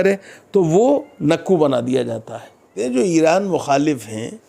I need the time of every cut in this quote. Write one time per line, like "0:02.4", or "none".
0:02.8